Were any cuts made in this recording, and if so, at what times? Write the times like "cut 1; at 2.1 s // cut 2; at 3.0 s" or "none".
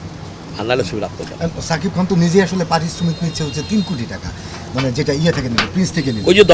none